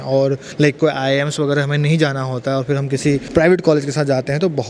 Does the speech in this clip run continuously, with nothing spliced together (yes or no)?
no